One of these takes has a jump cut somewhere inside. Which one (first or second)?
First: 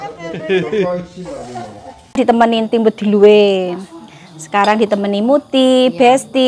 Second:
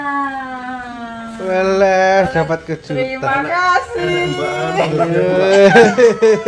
first